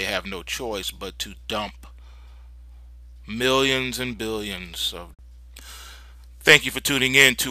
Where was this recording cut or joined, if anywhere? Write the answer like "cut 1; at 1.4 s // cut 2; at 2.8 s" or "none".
none